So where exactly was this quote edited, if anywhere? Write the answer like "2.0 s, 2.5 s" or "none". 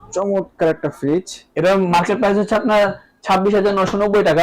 1.4 s